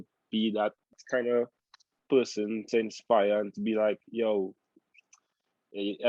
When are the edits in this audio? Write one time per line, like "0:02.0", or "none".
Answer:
0:01.0